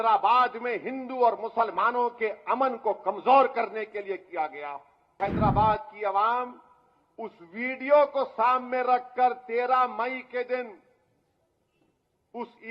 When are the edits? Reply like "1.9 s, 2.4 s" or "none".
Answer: 5.1 s